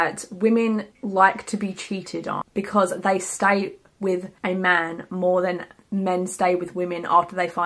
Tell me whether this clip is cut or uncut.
uncut